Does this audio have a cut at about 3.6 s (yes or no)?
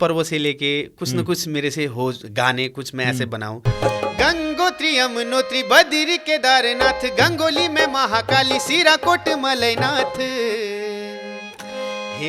yes